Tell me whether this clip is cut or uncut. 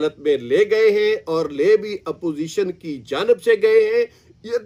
uncut